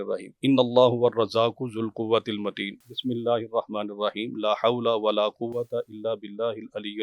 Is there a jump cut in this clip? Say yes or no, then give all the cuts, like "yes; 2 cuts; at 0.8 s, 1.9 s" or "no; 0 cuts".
no; 0 cuts